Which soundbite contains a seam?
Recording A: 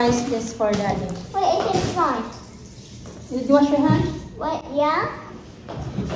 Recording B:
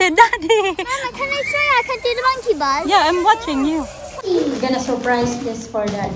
B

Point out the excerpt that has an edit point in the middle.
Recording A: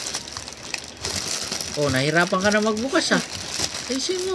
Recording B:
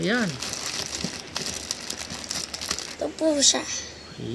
B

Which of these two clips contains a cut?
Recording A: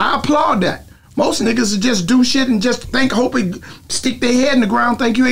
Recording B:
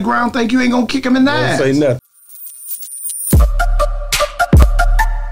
B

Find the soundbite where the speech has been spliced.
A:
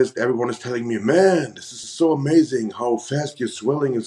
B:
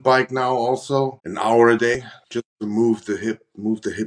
B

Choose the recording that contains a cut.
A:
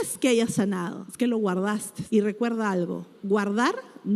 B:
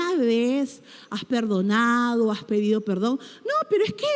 A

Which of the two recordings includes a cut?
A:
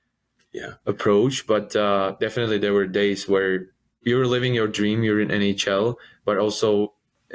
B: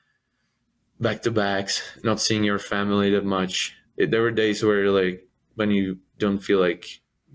A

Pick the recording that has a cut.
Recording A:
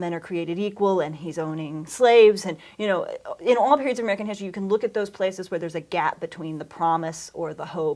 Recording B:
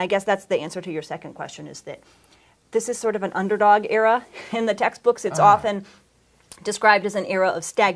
A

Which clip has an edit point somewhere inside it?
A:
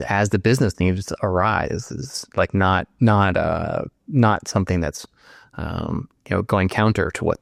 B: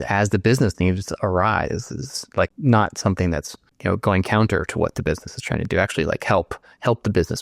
B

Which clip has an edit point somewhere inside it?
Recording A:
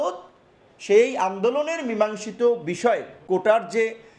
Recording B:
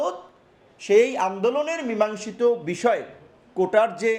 A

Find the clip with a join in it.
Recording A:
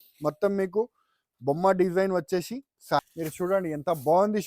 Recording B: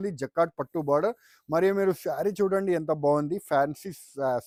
A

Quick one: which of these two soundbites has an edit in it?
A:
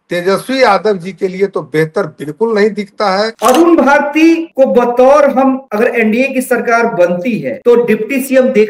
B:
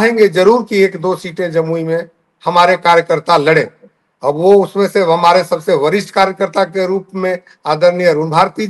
A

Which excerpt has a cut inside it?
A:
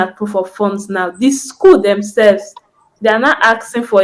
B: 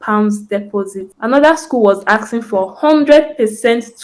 B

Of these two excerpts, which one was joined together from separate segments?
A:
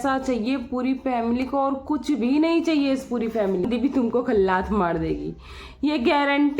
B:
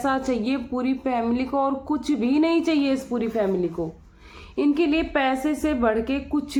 A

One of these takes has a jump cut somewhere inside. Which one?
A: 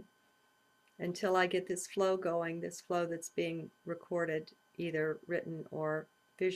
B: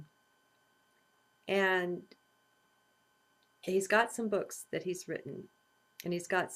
B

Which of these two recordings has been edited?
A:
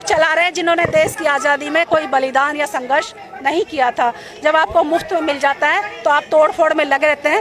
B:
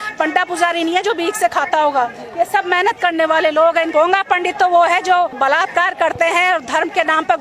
B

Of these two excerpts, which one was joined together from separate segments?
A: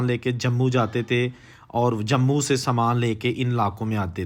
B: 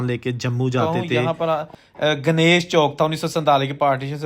B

